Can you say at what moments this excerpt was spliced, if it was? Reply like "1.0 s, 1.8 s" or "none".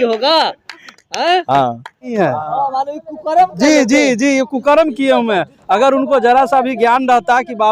2.1 s